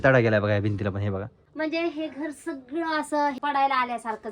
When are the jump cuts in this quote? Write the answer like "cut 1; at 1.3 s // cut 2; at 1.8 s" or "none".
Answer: cut 1; at 1.4 s // cut 2; at 3.4 s